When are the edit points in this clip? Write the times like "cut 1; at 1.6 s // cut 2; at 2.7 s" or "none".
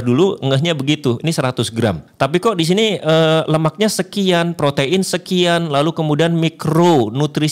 cut 1; at 2.1 s